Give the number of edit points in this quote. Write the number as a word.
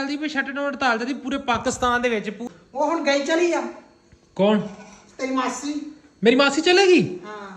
one